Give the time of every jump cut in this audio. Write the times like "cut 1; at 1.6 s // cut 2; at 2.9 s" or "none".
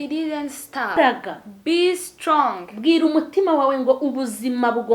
cut 1; at 1.0 s